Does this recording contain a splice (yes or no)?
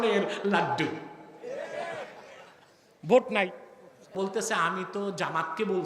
yes